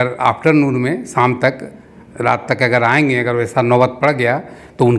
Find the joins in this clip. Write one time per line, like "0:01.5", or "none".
none